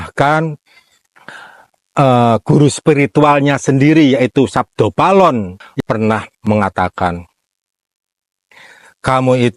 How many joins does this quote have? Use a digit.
1